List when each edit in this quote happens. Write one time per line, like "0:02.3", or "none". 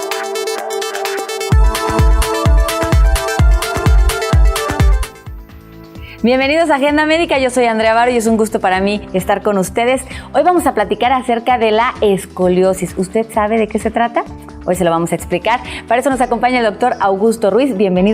0:01.6